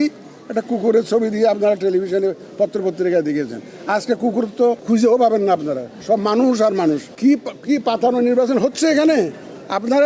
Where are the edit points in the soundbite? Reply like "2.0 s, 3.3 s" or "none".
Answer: 4.8 s, 7.1 s